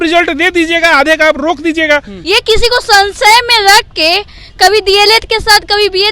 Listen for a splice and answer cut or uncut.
cut